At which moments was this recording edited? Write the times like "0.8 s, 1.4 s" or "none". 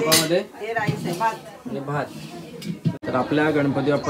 3.0 s